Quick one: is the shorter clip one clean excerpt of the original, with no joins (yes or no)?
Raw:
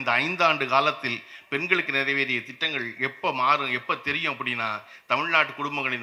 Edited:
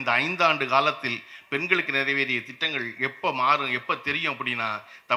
yes